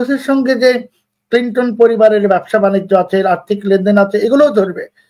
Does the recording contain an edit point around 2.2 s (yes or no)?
no